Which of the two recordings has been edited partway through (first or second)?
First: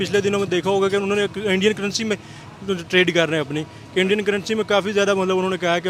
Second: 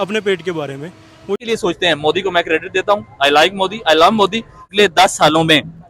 second